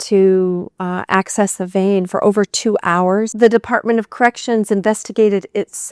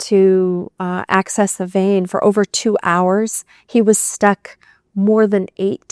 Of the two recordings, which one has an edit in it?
first; 1 cut; at 3.3 s

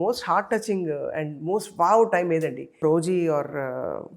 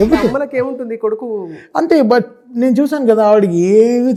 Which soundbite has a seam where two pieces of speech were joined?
first; 1 cut; at 2.8 s

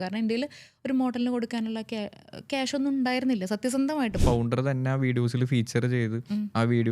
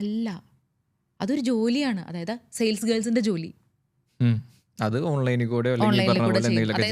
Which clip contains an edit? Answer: first; 1 cut; at 4.2 s

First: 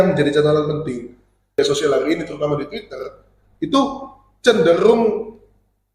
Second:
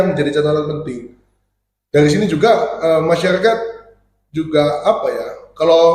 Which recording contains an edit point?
first; 1 cut; at 1.6 s

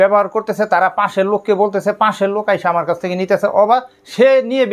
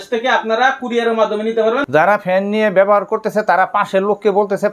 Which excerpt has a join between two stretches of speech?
second; 1 cut; at 1.9 s

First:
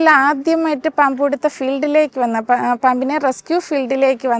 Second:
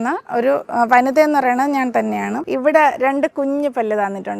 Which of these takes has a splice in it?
second; 1 cut; at 2.4 s

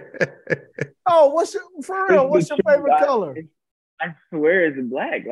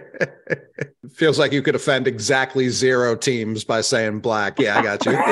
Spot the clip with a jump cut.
second; 1 cut; at 1.0 s

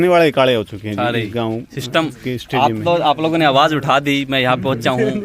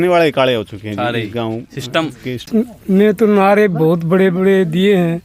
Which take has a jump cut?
second; 1 cut; at 2.5 s

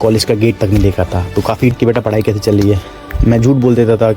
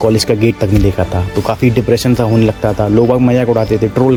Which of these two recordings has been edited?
first; 1 cut; at 1.7 s

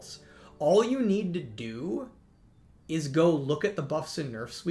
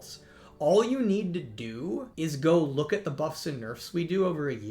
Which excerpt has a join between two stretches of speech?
second; 1 cut; at 2.1 s

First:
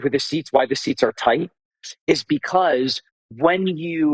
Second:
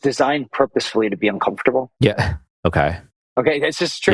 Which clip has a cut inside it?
second; 1 cut; at 1.9 s

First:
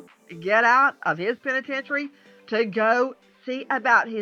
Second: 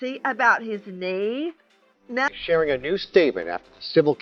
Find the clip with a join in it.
second; 1 cut; at 2.3 s

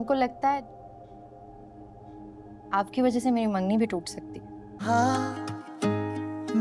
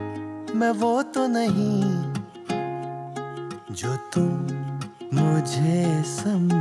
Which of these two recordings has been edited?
first; 1 cut; at 4.8 s

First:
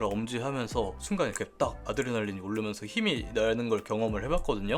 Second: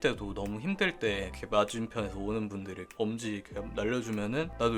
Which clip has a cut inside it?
second; 2 cuts; at 1.3 s, 2.9 s

